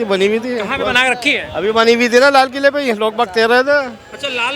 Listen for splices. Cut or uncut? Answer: uncut